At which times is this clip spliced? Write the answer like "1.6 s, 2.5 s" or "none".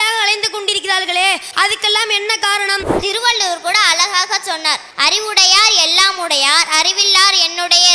1.5 s, 3.0 s, 4.9 s

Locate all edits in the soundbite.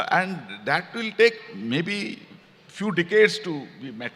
none

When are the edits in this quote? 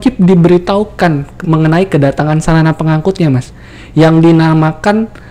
none

